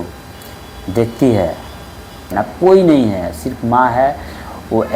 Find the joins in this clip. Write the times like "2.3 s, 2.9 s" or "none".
2.3 s